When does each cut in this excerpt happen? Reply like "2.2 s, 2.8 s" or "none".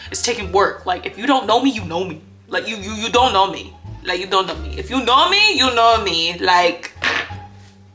none